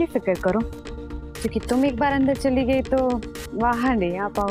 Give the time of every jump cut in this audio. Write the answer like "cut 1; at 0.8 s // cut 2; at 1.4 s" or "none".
none